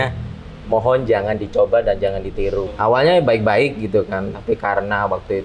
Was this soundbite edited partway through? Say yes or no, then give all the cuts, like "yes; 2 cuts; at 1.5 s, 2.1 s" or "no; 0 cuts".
yes; 1 cut; at 2.7 s